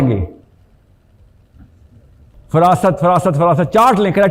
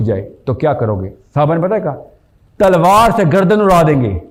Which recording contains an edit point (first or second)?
first